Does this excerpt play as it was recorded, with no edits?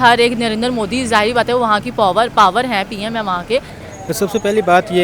no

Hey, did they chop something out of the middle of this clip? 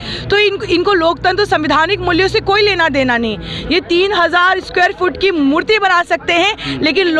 no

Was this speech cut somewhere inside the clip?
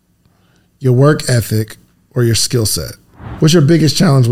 yes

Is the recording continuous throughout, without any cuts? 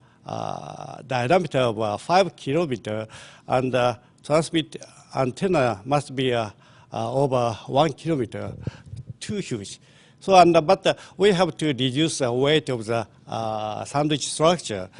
yes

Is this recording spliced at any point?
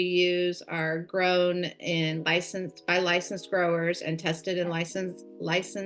no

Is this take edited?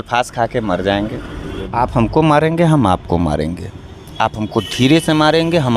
yes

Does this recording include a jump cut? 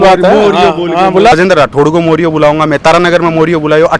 yes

